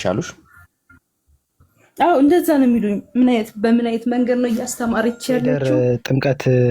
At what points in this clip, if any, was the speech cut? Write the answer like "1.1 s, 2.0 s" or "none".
5.6 s